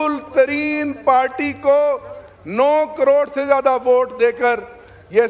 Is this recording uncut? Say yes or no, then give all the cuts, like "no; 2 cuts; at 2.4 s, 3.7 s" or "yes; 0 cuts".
yes; 0 cuts